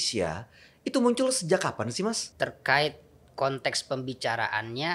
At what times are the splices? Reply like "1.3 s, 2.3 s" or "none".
2.3 s